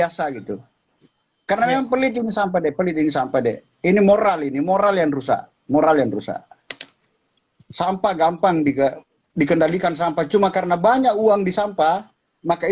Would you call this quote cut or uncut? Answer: uncut